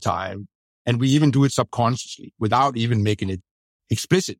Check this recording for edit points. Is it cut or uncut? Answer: cut